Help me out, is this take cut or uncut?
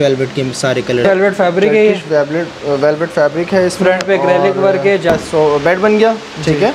cut